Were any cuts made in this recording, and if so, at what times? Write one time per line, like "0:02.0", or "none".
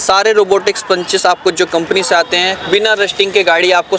none